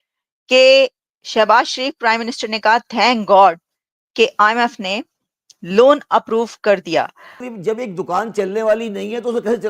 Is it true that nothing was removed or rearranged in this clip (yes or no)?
no